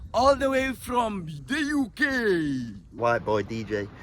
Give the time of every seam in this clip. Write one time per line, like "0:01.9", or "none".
0:02.8

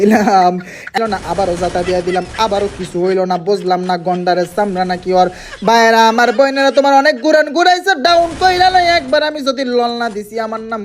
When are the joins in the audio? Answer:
0:01.0

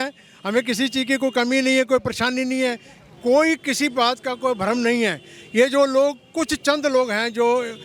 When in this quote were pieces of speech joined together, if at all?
none

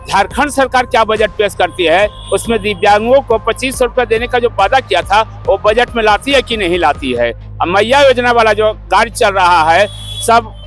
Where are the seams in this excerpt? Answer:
none

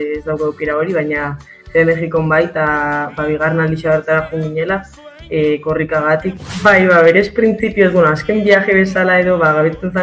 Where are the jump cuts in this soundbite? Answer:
0:06.3

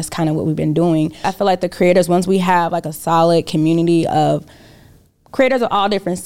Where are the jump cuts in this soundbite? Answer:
0:01.3

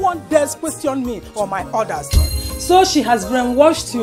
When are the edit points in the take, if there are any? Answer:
0:02.2

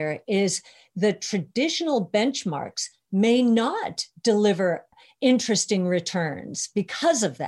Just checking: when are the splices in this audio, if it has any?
0:04.9

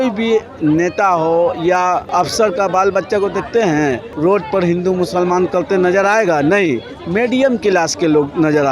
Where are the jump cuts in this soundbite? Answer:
0:02.1
0:04.1

